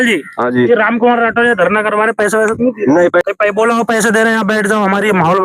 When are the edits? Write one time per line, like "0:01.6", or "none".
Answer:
0:03.2